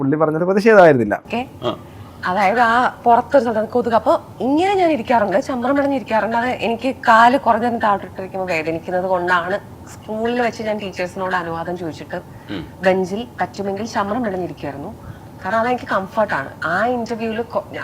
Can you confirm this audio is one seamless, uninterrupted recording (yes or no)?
yes